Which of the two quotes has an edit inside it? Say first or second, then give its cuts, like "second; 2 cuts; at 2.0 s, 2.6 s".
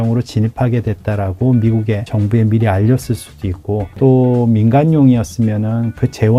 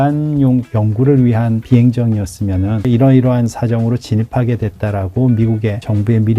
second; 2 cuts; at 1.6 s, 2.8 s